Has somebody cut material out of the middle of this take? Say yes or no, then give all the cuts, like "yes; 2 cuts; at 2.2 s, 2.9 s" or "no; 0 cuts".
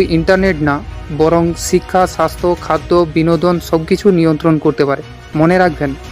yes; 1 cut; at 5.2 s